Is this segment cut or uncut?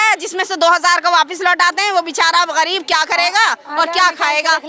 uncut